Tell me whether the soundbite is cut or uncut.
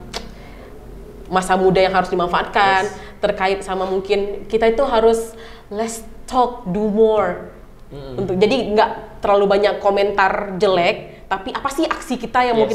uncut